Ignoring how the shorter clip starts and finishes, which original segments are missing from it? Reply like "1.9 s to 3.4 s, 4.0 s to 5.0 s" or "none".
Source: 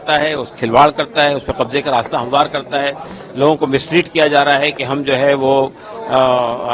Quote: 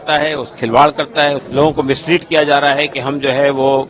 1.4 s to 3.3 s